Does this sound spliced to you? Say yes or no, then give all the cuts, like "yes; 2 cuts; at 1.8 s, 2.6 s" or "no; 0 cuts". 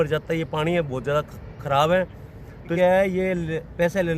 yes; 1 cut; at 2.7 s